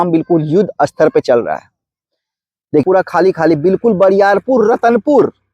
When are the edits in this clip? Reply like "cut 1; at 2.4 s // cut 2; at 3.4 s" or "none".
cut 1; at 2.8 s